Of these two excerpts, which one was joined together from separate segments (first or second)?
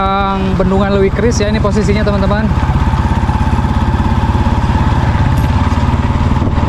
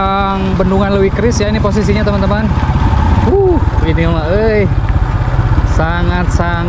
second